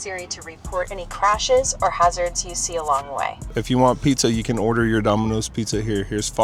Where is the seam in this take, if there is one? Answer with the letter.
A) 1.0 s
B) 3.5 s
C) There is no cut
B